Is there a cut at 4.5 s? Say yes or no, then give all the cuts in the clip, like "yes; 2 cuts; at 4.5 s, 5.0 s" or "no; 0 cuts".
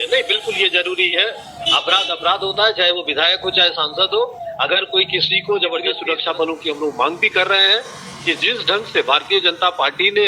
no; 1 cut; at 6.0 s